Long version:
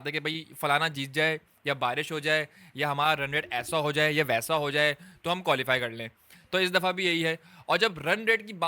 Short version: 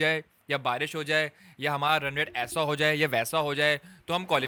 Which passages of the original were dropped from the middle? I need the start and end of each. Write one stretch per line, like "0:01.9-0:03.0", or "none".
none